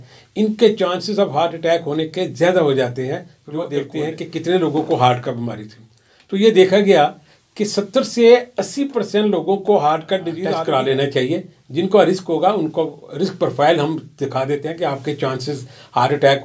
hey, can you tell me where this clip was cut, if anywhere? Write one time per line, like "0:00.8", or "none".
0:03.7
0:10.3

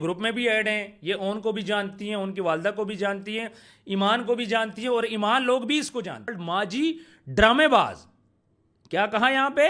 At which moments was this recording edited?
0:06.4

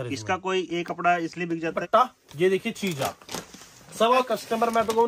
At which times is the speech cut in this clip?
0:01.8
0:04.2

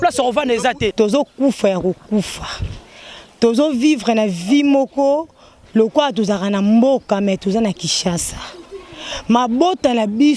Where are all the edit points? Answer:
0:00.9

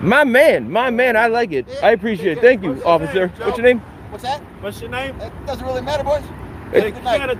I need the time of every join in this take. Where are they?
none

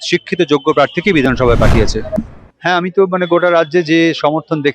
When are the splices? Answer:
0:02.1

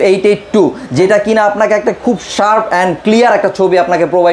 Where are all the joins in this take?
none

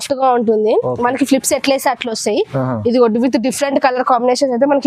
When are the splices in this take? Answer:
none

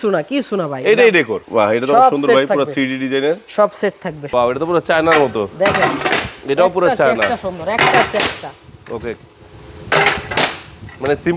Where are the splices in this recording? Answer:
0:01.4
0:04.1

